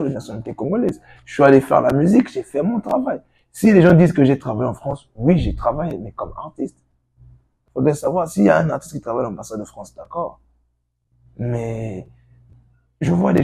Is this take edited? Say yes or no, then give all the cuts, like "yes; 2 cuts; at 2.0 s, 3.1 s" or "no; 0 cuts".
yes; 1 cut; at 7.6 s